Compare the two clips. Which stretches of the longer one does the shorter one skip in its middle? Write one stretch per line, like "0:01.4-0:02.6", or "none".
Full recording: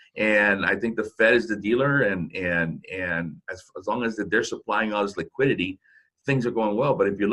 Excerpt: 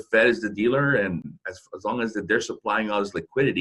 0:02.3-0:03.3